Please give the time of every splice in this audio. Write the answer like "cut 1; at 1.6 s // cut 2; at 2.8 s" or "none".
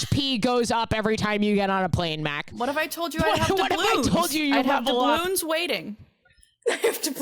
none